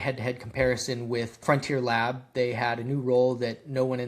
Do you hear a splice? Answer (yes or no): yes